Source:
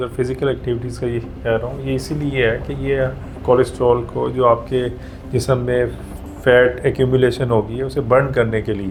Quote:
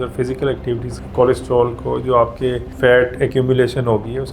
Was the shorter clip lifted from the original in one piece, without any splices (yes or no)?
no